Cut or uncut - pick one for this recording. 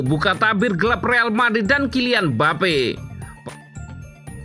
cut